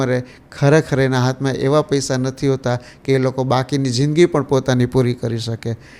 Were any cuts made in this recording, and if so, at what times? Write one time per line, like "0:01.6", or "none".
none